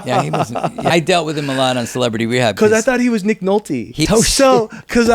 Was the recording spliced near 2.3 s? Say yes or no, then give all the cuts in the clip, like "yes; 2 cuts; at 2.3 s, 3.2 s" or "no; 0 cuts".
no; 2 cuts; at 0.9 s, 4.0 s